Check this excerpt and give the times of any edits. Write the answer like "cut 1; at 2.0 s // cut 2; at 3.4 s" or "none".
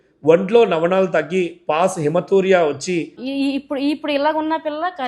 cut 1; at 3.2 s